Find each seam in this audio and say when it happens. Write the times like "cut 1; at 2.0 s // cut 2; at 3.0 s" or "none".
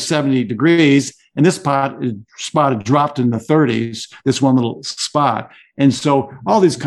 none